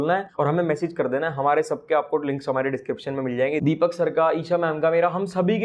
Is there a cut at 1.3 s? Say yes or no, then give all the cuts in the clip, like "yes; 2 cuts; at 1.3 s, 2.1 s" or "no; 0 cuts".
no; 0 cuts